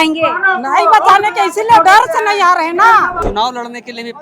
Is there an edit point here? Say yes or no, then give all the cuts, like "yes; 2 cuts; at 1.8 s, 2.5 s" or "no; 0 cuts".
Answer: yes; 1 cut; at 3.2 s